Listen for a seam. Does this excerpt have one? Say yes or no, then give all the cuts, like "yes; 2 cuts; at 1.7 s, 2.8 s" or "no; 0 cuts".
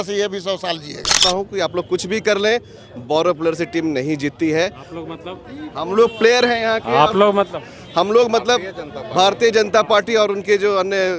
yes; 1 cut; at 1.2 s